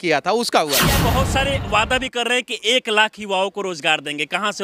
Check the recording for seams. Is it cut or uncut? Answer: cut